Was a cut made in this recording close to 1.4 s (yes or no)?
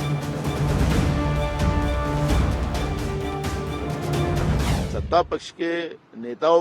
yes